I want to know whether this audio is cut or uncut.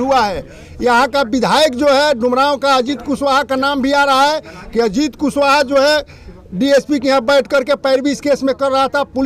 uncut